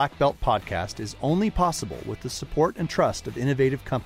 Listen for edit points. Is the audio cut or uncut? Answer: uncut